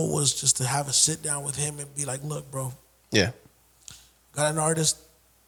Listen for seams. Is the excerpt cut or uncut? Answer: uncut